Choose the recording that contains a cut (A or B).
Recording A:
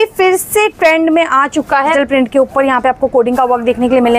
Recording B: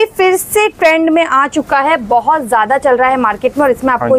A